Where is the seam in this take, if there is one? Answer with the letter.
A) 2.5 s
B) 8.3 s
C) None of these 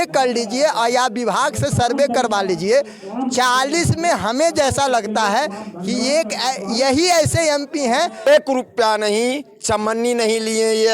B